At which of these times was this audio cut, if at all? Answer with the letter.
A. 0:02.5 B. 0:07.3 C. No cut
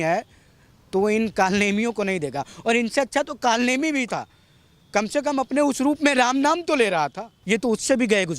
B